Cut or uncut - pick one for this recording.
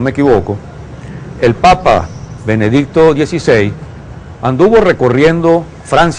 cut